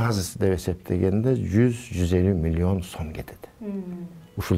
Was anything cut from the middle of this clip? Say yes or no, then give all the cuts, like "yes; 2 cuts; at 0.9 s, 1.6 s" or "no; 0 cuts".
no; 0 cuts